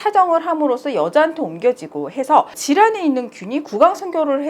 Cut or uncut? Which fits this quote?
cut